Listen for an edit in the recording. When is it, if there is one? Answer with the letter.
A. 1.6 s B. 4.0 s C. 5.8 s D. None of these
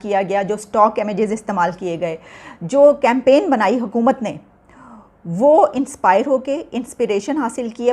C